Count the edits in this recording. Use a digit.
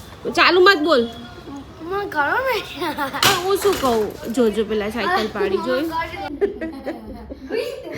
1